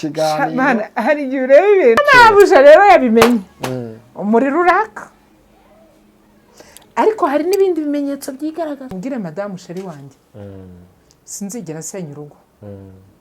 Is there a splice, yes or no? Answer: yes